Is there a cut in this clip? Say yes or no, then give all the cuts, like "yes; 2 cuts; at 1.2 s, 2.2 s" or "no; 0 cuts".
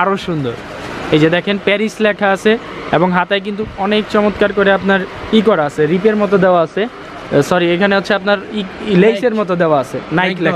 no; 0 cuts